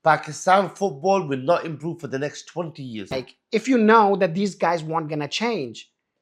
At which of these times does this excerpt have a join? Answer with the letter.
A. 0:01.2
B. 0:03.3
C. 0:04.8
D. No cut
B